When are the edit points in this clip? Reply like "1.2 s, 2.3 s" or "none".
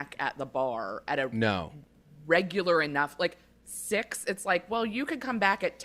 none